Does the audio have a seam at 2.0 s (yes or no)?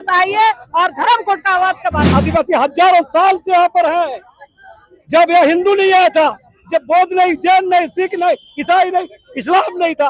yes